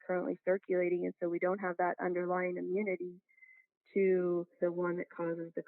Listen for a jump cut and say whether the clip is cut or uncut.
cut